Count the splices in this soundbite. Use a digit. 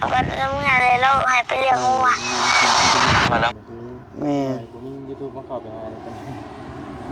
1